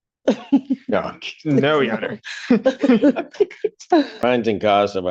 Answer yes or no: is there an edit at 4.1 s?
yes